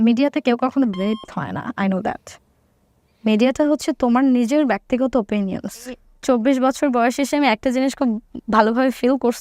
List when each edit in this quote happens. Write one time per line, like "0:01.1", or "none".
0:06.0